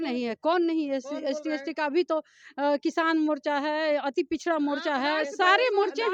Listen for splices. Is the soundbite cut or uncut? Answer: uncut